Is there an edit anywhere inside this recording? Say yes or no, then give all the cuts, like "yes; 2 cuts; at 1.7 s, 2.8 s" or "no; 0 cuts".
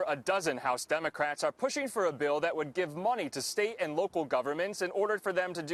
no; 0 cuts